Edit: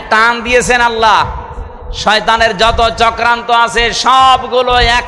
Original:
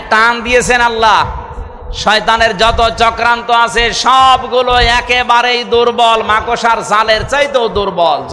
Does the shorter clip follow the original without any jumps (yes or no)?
yes